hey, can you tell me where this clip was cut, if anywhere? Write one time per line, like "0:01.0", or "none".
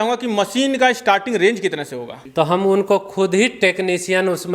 0:02.0